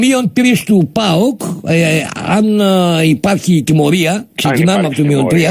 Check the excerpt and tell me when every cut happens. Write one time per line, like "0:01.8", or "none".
0:01.9